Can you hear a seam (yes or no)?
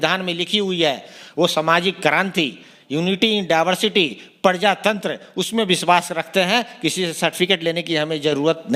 no